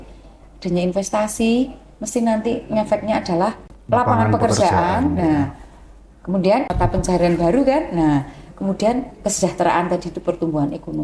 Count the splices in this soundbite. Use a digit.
2